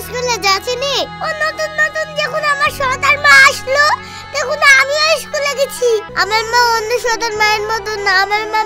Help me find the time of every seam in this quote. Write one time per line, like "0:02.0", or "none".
0:06.1